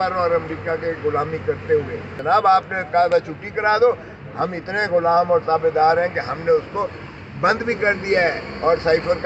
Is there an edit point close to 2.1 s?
yes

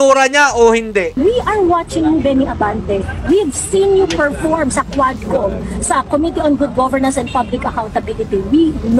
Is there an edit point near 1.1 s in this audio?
yes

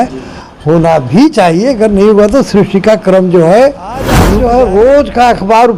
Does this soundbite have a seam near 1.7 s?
no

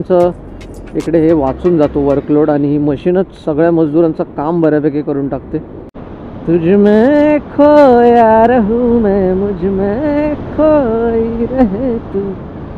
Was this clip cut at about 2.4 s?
no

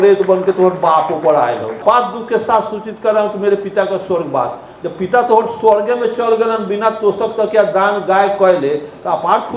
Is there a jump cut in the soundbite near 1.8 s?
yes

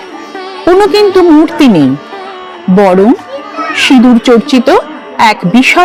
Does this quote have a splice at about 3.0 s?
no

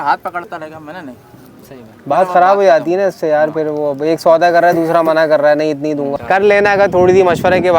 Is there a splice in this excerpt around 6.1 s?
yes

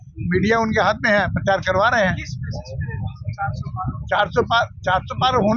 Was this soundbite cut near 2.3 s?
no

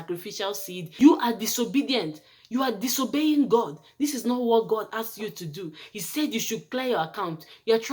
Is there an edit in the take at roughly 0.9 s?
yes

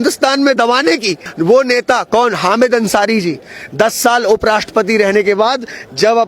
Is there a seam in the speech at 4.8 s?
no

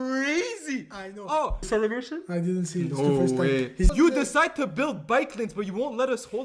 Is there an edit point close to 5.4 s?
no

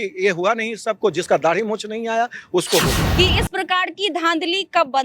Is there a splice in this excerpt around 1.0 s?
no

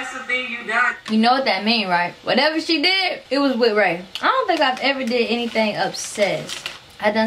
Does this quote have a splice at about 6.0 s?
no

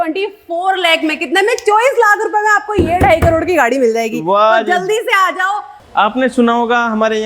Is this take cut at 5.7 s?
yes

